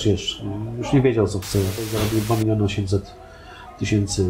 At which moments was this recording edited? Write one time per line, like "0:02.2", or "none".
0:01.8

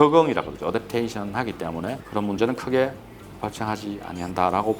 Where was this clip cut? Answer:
0:02.0

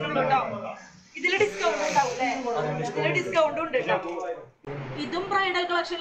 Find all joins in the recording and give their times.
0:04.6

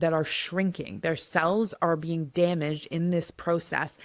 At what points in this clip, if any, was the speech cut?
none

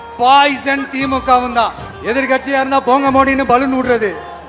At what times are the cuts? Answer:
0:01.9

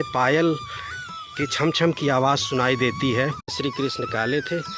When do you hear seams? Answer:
0:03.5

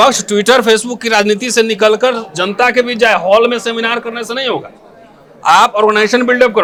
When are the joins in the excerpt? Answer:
none

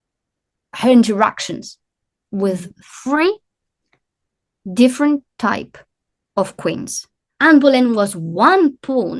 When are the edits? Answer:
0:07.2

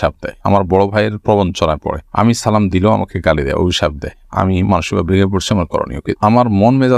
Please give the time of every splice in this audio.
0:06.0

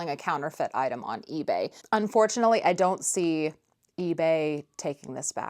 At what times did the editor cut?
0:01.7

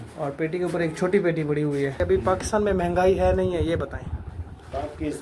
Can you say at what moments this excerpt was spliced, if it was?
0:02.0

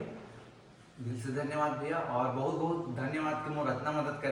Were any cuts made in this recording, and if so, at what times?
none

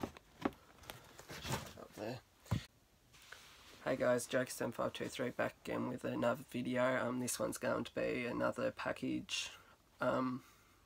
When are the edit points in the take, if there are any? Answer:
none

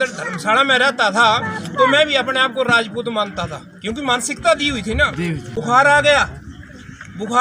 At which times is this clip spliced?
0:05.5

